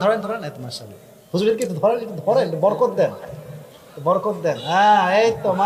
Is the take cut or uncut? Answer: uncut